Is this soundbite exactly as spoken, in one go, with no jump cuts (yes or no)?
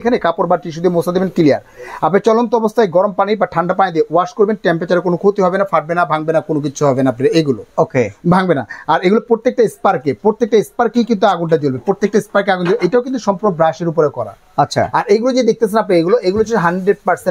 yes